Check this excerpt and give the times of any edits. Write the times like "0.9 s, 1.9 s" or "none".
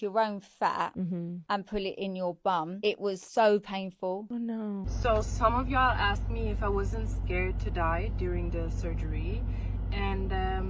4.8 s